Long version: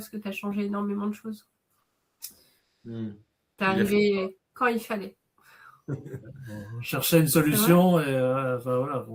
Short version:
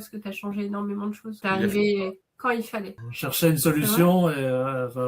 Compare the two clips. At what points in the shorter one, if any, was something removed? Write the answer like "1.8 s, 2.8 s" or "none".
1.4 s, 3.0 s